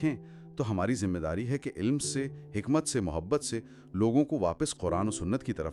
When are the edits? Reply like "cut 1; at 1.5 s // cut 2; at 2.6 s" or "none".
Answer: none